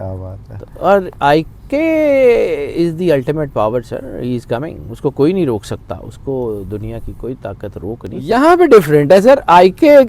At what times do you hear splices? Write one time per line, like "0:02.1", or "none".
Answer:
0:08.3